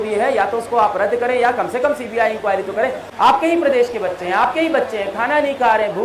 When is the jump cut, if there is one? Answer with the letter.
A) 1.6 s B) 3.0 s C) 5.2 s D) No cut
B